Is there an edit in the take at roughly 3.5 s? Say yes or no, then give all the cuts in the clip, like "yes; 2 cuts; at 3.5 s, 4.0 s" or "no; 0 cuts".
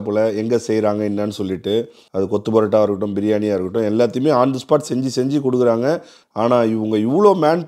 no; 2 cuts; at 2.0 s, 6.2 s